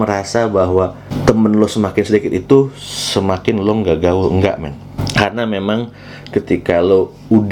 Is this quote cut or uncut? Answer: uncut